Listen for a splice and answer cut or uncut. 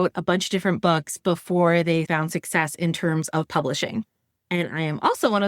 cut